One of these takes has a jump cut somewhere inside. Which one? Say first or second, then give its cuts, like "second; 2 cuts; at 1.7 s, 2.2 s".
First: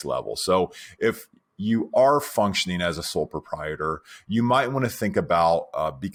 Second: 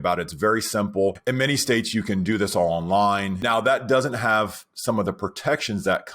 second; 1 cut; at 3.4 s